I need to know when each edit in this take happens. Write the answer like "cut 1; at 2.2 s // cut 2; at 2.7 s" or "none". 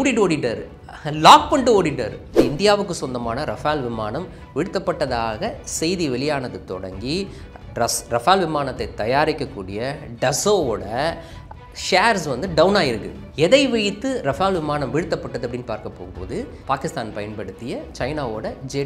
cut 1; at 2.5 s // cut 2; at 13.3 s // cut 3; at 16.6 s